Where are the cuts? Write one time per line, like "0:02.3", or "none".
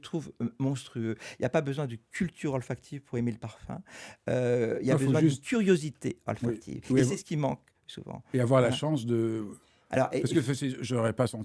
none